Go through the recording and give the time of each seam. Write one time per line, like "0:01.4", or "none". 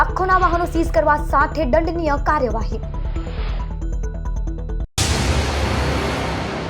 0:04.8